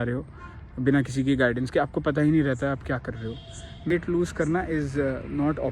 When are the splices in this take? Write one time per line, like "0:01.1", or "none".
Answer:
0:03.9